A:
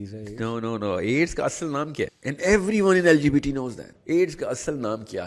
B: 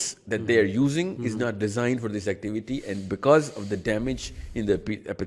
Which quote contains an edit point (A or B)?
A